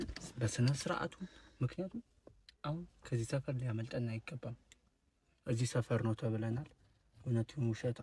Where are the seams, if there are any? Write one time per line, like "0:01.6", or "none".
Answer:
none

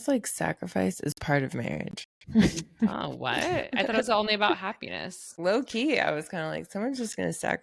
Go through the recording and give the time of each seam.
0:05.3

